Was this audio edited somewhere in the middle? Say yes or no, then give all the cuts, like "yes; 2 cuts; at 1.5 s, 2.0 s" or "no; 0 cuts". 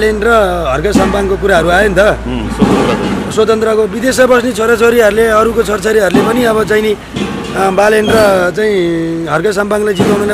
no; 0 cuts